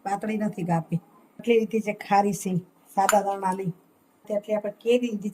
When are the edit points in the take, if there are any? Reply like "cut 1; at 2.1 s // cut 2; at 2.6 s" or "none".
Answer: cut 1; at 1.4 s // cut 2; at 4.2 s